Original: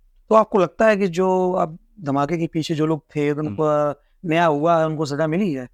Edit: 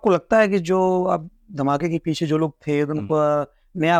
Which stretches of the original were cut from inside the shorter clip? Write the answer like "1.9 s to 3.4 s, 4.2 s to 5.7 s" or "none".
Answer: none

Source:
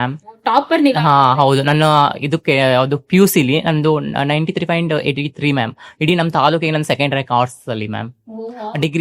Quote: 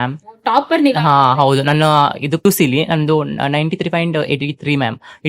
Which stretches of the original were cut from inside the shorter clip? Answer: 2.4 s to 3.2 s

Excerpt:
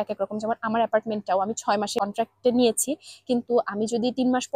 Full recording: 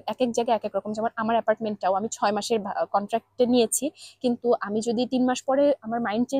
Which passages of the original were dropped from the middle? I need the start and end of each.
2.5 s to 2.9 s

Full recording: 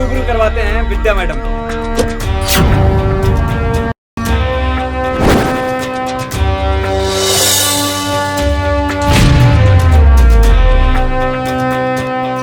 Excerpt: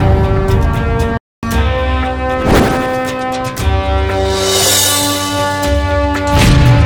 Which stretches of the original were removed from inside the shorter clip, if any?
none

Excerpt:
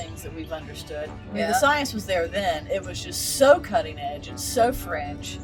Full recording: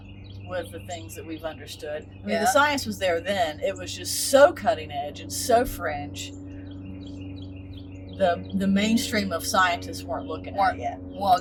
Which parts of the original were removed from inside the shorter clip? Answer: none

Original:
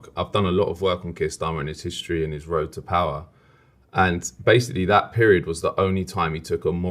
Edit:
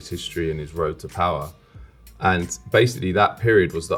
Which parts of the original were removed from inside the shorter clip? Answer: none

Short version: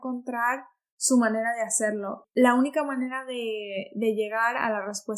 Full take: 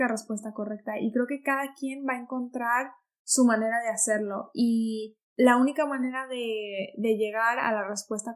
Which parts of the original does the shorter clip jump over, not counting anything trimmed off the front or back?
4.4 s to 5.2 s

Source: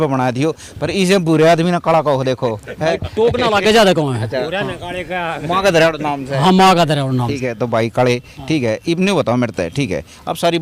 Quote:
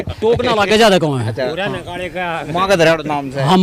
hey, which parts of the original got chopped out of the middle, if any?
none

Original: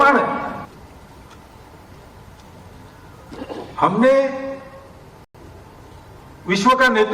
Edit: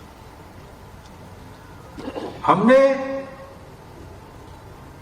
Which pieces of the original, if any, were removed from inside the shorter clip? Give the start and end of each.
5.2 s to 5.3 s

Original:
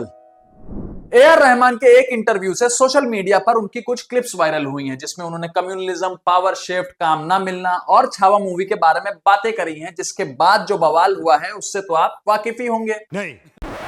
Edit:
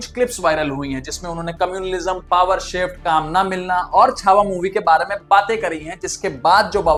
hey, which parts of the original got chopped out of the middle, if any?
none

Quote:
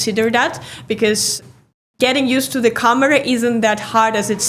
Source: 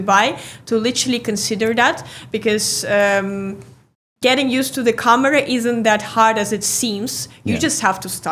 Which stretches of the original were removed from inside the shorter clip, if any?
2.7 s to 3.5 s

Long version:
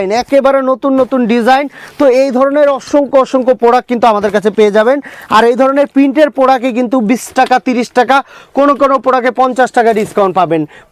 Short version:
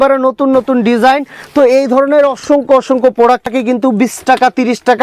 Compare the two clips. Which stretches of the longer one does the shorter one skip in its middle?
3.9 s to 6.6 s

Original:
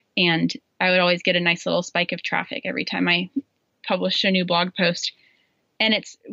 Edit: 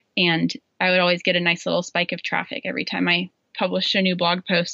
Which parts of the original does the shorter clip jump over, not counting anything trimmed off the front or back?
3.3 s to 3.6 s

